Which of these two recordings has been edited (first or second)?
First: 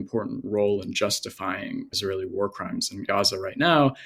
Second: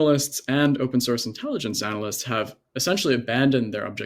first